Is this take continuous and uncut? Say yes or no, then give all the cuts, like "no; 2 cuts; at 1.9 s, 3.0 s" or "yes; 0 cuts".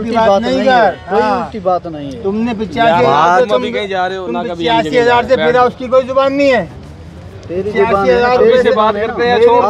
yes; 0 cuts